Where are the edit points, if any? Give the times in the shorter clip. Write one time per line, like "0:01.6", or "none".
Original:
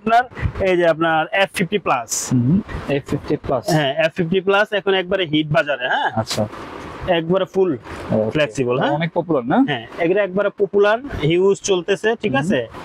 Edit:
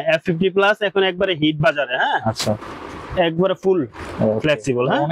none

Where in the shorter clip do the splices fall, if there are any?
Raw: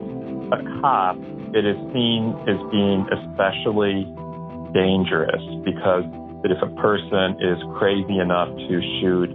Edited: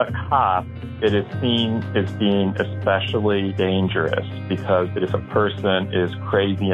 0:03.5
0:04.9

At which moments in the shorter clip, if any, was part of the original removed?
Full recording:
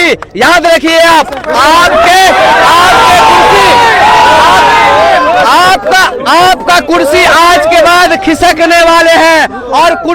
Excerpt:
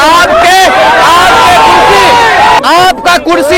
0:02.6

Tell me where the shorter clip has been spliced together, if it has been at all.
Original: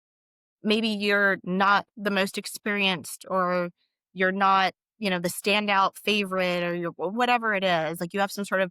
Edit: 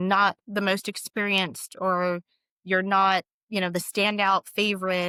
none

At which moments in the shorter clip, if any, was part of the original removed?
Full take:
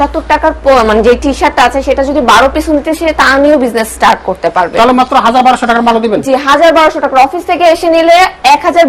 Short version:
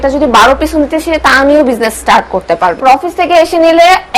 0:02.8

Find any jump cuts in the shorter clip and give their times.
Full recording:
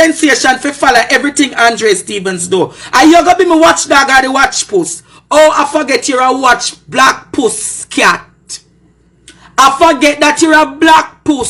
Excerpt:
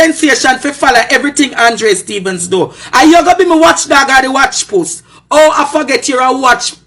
none

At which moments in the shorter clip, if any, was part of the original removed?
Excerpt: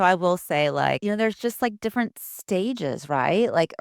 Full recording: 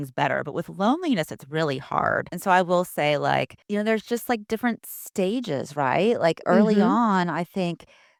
0:01.0

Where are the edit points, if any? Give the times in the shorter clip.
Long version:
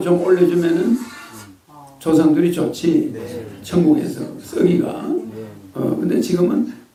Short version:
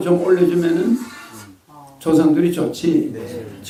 none

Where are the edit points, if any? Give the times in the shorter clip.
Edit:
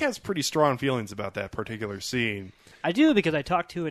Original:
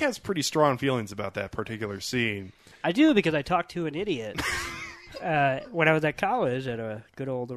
none

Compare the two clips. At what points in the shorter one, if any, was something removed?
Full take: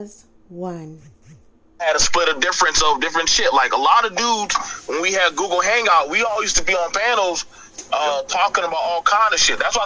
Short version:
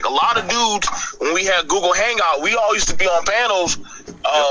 none

